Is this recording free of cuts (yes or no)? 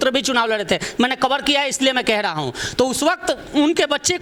yes